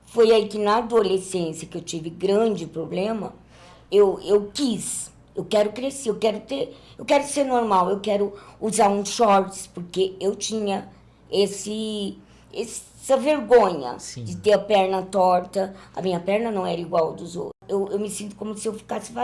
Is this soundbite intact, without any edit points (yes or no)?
no